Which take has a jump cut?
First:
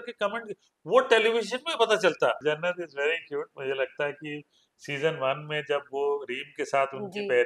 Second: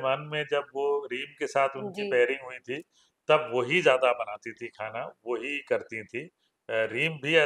first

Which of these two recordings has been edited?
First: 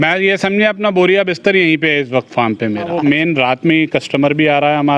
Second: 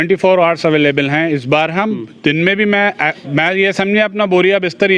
first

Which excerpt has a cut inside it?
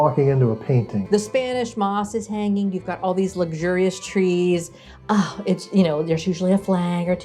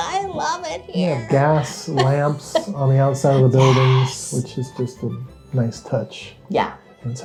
first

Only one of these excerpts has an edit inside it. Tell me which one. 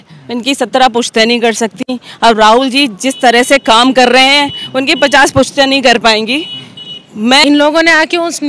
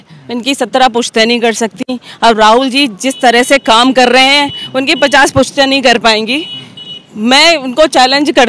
first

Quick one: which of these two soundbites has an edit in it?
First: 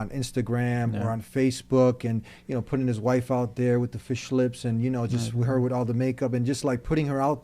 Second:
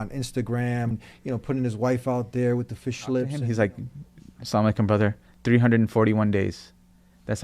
second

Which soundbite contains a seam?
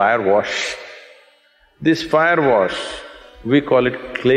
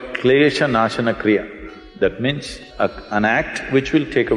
second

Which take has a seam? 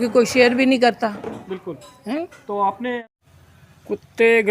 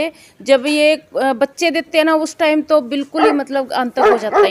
first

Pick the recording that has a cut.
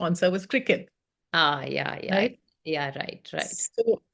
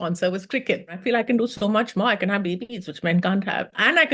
second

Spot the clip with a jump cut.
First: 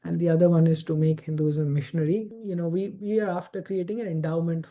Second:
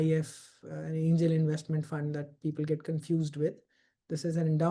first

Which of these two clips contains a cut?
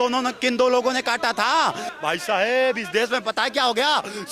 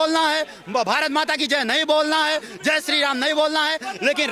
first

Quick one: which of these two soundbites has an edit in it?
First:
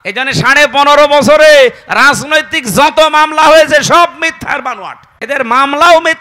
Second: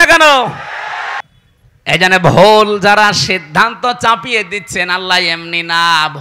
second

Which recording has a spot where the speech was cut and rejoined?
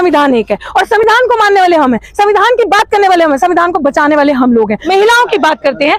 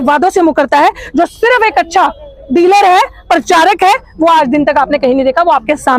first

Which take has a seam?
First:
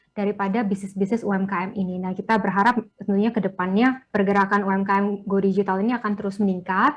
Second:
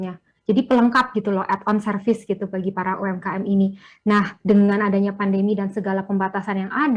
first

